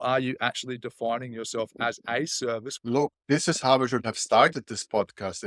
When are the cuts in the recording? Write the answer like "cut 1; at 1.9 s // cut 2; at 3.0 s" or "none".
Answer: cut 1; at 2.7 s